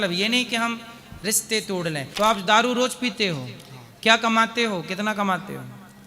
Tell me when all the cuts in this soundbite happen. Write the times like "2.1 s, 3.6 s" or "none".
2.1 s